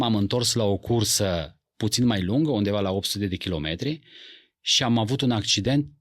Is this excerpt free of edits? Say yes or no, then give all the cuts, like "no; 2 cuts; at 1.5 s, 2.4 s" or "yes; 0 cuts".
yes; 0 cuts